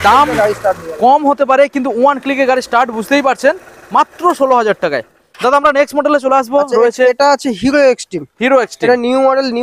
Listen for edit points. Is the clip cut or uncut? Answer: uncut